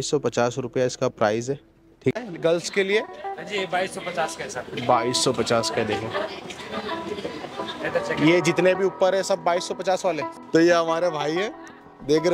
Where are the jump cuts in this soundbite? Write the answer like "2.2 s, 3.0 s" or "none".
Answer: 2.1 s, 10.3 s